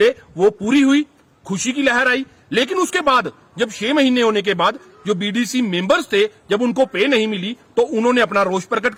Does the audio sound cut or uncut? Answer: uncut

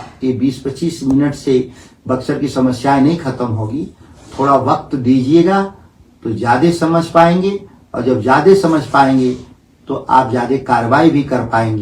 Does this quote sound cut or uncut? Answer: uncut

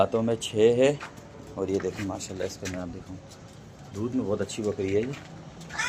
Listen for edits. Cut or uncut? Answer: uncut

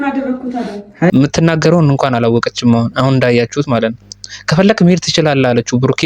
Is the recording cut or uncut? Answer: cut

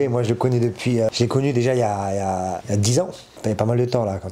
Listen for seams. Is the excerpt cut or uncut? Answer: cut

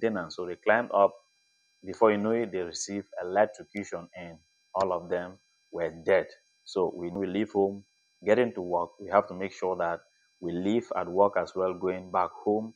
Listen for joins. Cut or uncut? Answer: cut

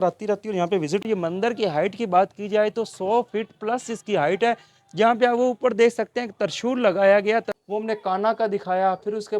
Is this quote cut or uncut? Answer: cut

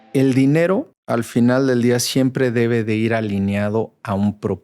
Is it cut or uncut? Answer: cut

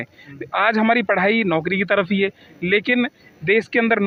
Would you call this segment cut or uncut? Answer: uncut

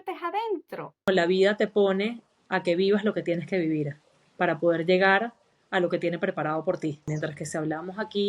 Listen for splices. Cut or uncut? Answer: cut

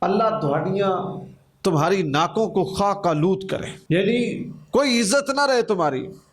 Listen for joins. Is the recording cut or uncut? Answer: cut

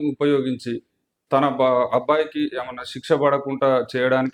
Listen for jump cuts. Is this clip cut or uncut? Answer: uncut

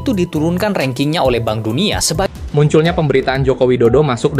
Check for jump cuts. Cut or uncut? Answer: cut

